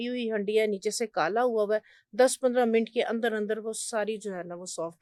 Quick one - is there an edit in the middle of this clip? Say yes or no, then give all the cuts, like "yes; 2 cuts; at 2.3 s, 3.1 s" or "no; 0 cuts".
no; 0 cuts